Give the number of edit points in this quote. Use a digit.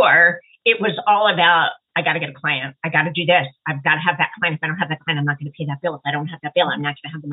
0